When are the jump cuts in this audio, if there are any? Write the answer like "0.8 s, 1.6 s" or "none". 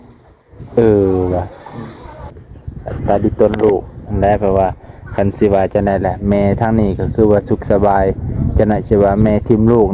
2.3 s